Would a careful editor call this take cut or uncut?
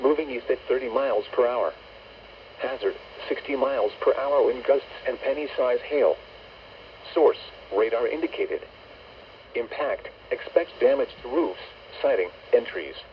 cut